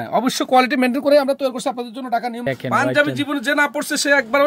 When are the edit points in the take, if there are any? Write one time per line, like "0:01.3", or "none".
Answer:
0:02.5